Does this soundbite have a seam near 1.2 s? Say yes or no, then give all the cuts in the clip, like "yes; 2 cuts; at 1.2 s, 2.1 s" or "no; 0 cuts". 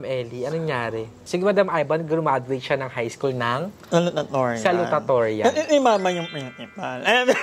yes; 1 cut; at 1.2 s